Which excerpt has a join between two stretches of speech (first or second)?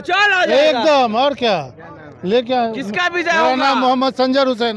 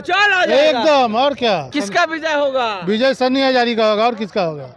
second